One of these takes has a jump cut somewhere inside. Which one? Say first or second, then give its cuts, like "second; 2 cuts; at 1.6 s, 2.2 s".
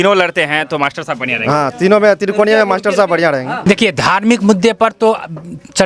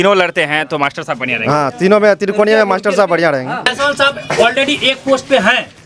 first; 1 cut; at 3.6 s